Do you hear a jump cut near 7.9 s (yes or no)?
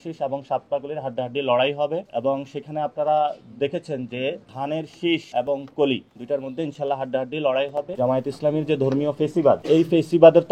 yes